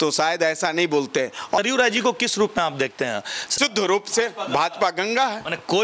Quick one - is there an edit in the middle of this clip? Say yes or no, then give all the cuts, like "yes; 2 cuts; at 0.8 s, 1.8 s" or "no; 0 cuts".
yes; 2 cuts; at 1.6 s, 3.5 s